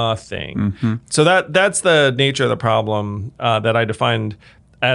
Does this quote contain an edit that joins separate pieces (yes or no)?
yes